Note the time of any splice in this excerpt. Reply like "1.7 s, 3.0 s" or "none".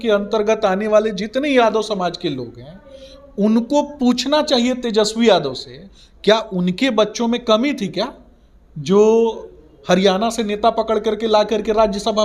none